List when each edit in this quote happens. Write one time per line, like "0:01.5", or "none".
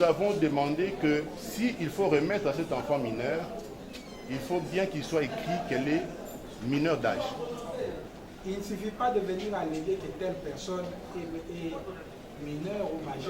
0:08.1